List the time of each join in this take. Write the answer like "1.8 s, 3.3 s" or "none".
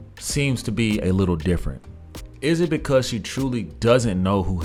none